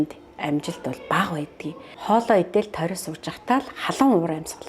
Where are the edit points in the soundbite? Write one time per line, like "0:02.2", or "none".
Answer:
0:02.0